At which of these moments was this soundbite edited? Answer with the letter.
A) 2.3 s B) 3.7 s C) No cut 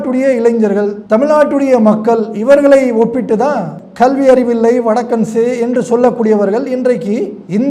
B